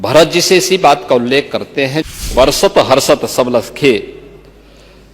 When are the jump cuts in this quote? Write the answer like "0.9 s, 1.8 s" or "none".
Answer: 2.2 s